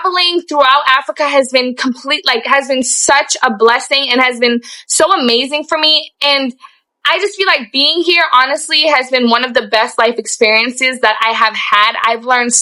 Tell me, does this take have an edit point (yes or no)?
no